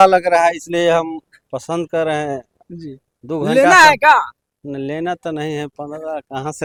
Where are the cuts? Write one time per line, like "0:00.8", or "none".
none